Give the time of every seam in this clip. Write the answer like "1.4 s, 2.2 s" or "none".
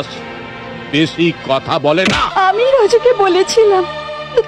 2.2 s